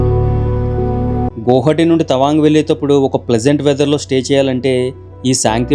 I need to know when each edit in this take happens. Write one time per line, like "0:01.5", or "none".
0:01.3